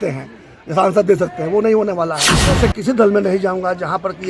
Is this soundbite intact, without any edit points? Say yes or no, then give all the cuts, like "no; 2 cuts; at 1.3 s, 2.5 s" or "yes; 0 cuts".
no; 1 cut; at 2.6 s